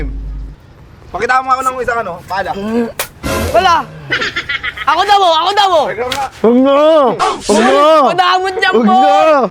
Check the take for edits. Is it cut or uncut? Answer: uncut